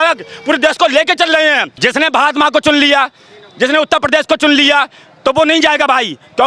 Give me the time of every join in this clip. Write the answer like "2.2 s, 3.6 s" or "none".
1.7 s